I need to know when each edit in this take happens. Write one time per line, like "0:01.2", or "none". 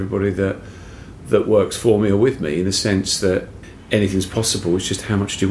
0:03.5